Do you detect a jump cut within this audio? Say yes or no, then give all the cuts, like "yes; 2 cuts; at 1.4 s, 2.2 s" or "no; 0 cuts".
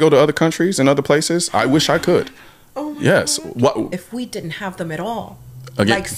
yes; 1 cut; at 3.9 s